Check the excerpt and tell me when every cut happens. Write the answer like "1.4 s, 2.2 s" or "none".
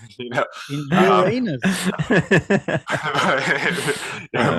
none